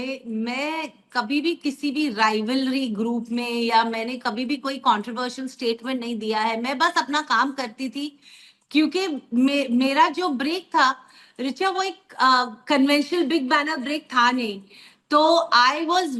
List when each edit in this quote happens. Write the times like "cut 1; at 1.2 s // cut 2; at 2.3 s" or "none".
none